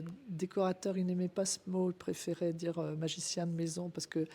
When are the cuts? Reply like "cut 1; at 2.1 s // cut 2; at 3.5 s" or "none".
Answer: none